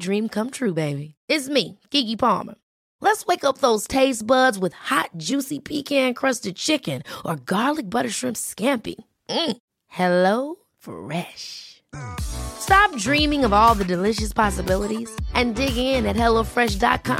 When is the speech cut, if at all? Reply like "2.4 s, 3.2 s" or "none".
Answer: none

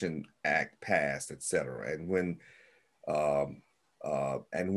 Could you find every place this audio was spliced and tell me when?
none

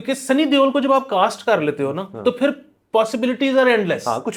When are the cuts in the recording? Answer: none

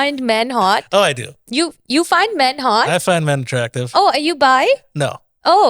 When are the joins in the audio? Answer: none

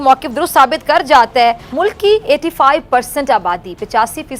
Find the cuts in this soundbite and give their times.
1.6 s

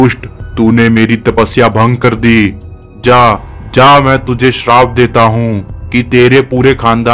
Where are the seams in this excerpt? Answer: none

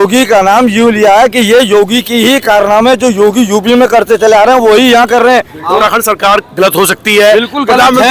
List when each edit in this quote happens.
5.8 s

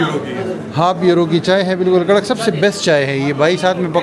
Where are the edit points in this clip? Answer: none

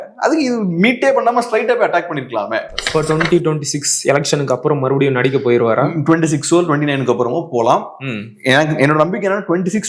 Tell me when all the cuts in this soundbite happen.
2.8 s

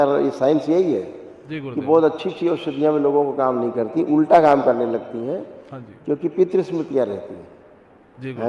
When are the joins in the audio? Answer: none

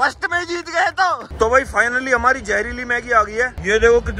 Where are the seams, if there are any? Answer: 1.2 s

